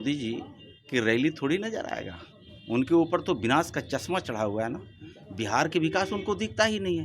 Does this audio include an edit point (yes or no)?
no